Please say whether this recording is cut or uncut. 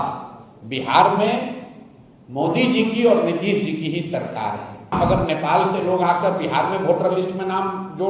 cut